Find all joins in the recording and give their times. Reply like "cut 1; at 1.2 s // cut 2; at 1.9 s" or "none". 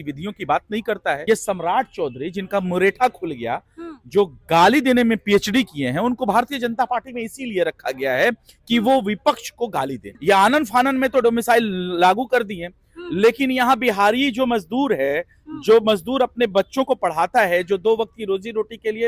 cut 1; at 1.2 s // cut 2; at 10.0 s